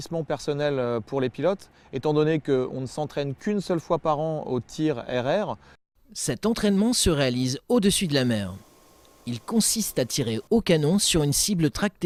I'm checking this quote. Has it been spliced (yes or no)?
no